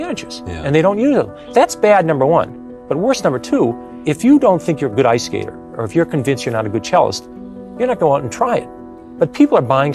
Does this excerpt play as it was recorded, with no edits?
no; 2 cuts; at 1.4 s, 3.9 s

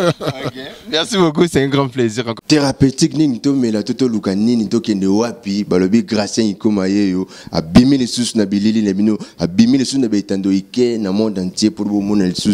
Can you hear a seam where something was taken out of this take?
yes; 1 cut; at 2.3 s

